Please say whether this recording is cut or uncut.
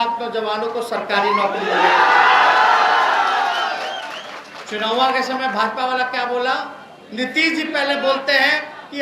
uncut